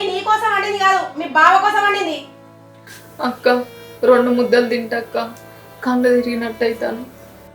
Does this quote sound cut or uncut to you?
uncut